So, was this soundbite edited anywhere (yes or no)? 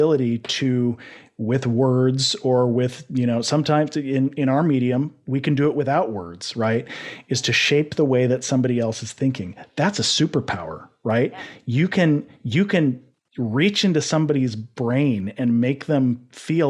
no